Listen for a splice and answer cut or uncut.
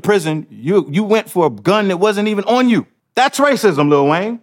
cut